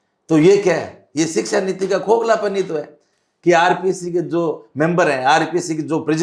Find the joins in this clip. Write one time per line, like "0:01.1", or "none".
none